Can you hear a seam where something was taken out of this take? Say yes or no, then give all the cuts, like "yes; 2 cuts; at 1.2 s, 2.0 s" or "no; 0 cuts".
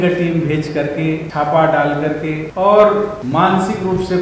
yes; 3 cuts; at 1.3 s, 2.5 s, 3.2 s